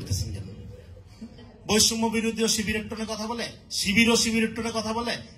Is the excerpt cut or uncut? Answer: cut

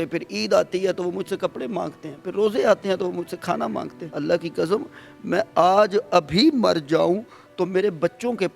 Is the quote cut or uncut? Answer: cut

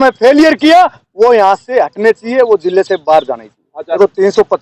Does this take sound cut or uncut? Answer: uncut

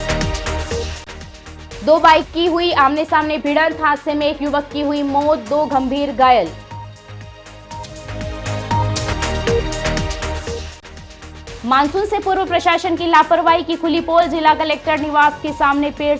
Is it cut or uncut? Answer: cut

